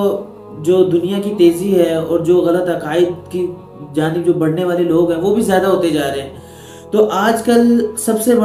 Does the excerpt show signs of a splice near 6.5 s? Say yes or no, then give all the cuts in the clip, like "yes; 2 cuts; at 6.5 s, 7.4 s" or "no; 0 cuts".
no; 0 cuts